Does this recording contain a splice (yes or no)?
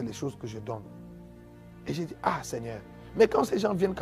no